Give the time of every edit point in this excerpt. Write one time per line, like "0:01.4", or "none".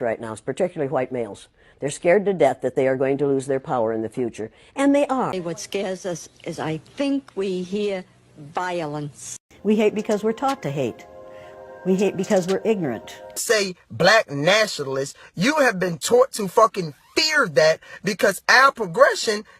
0:05.4
0:09.5
0:13.4